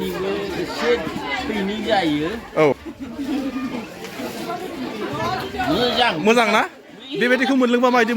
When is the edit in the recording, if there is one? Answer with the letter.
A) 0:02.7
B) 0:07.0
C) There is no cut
A